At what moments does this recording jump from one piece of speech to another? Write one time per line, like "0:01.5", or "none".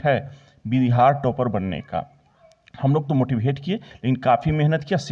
none